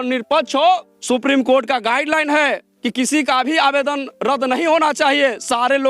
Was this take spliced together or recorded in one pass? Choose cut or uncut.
cut